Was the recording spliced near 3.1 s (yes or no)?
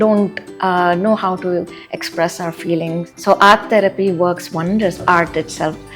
yes